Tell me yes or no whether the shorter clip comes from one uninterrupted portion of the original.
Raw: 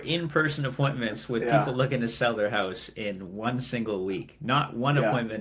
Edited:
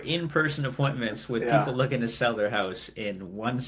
yes